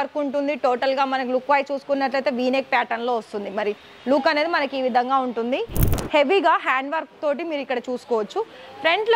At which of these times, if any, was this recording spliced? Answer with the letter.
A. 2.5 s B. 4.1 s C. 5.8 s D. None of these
C